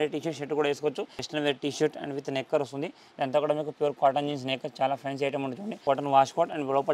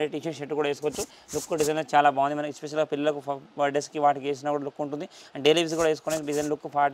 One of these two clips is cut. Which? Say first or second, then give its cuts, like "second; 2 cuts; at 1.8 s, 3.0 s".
first; 2 cuts; at 1.2 s, 5.8 s